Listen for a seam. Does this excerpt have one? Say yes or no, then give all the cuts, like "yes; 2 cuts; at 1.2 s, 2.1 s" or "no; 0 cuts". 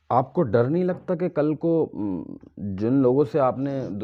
no; 0 cuts